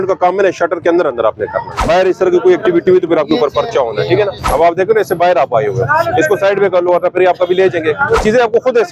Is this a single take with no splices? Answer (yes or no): no